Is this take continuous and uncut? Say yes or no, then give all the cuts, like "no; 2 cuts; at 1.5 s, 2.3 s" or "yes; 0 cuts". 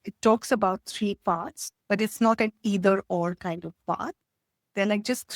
yes; 0 cuts